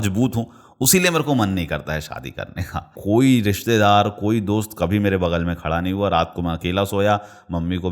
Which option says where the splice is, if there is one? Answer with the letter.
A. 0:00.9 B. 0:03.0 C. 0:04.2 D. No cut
B